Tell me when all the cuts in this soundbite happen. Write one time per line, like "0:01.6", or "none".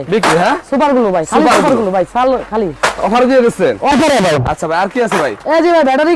none